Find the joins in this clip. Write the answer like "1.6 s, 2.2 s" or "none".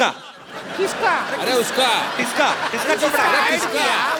none